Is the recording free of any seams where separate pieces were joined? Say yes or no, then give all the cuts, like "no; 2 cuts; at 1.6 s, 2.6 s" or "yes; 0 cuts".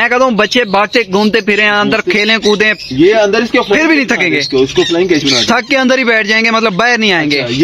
yes; 0 cuts